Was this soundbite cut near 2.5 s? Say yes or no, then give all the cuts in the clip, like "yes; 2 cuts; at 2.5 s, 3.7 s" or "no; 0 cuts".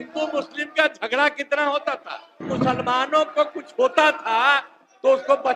yes; 1 cut; at 2.5 s